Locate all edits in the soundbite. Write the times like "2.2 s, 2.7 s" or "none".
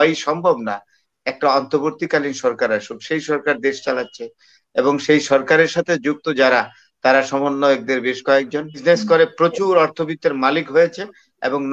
8.8 s